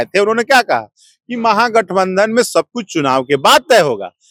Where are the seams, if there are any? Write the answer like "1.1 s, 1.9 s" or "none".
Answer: none